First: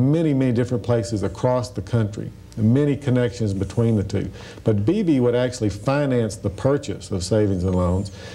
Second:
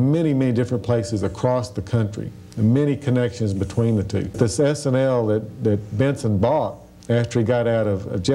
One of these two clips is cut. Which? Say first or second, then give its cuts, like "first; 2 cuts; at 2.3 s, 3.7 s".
second; 1 cut; at 4.3 s